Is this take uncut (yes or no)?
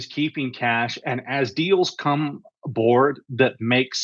yes